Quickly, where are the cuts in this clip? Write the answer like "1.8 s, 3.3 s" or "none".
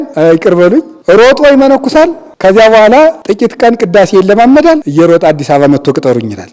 none